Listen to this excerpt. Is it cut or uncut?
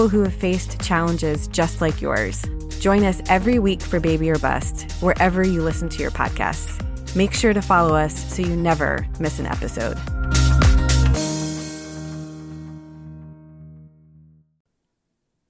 cut